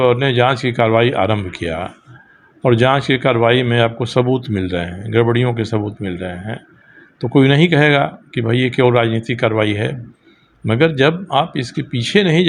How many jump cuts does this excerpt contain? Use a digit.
0